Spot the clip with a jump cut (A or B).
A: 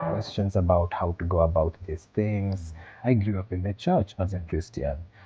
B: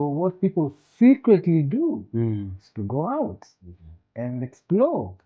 A